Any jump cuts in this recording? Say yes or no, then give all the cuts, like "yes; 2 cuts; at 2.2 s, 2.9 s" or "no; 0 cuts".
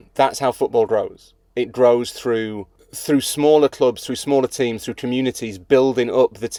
no; 0 cuts